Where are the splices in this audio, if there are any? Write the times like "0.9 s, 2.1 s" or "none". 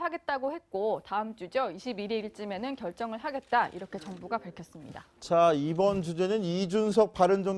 3.1 s